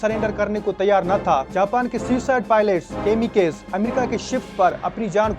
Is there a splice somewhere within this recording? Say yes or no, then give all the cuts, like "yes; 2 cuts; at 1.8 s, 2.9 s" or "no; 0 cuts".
no; 0 cuts